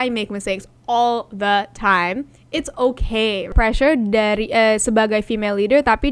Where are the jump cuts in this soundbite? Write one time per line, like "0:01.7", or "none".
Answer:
0:03.5

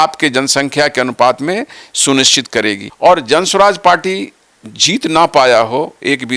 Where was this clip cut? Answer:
0:02.9

